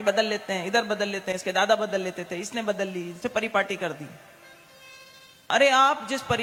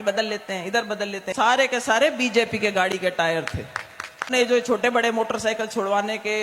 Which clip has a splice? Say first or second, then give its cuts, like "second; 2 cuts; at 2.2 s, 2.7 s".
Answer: second; 2 cuts; at 1.3 s, 4.3 s